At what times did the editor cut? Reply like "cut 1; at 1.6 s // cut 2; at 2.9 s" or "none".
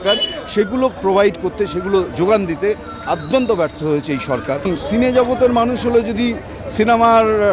cut 1; at 4.7 s